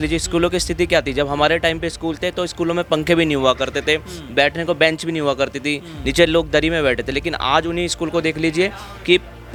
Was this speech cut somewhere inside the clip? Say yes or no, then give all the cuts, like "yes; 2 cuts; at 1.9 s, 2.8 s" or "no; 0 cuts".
no; 0 cuts